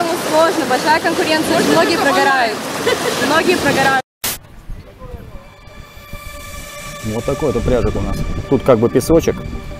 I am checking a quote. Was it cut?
yes; 2 cuts; at 4.0 s, 6.6 s

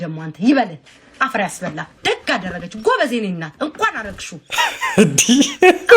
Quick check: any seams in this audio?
yes; 1 cut; at 1.9 s

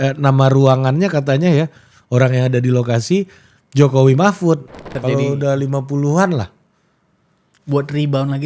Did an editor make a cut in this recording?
yes; 1 cut; at 4.9 s

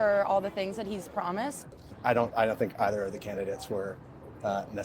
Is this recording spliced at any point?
yes; 1 cut; at 1.7 s

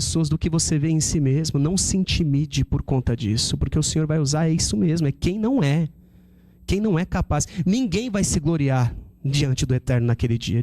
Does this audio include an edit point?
no; 0 cuts

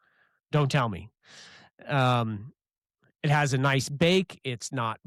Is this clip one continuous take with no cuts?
yes; 0 cuts

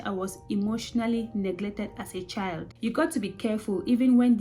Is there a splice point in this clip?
yes; 1 cut; at 2.7 s

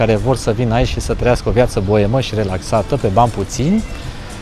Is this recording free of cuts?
yes; 0 cuts

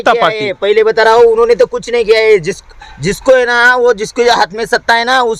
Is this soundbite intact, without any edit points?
yes; 0 cuts

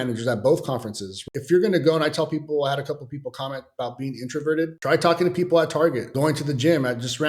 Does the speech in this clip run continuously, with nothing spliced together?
no; 3 cuts; at 1.2 s, 4.8 s, 6.1 s

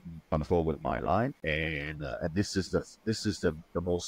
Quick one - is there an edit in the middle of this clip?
yes; 1 cut; at 1.4 s

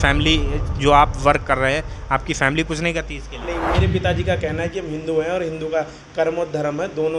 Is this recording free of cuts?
yes; 0 cuts

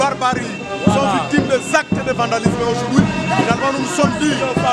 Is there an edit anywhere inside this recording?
no; 0 cuts

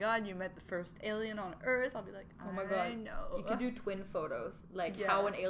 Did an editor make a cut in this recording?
no; 0 cuts

